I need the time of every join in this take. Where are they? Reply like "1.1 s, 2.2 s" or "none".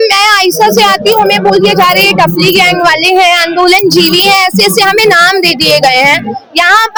none